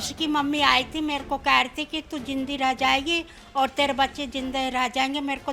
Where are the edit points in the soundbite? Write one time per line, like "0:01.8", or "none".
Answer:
none